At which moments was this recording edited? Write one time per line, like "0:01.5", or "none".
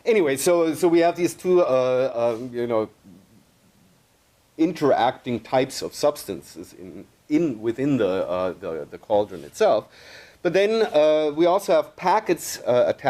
0:10.6